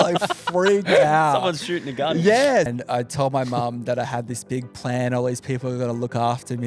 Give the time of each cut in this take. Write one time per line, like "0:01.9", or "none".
0:02.7

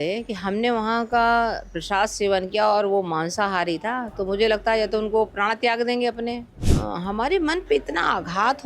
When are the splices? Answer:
0:06.6

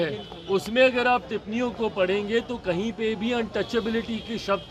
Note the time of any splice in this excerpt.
none

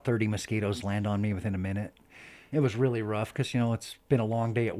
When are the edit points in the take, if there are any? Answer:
0:02.3

